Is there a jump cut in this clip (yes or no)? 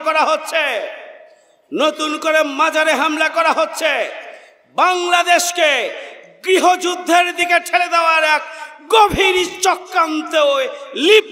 no